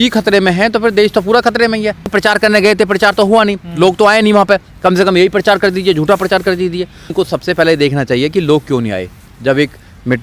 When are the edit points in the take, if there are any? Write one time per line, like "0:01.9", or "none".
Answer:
0:02.1
0:07.1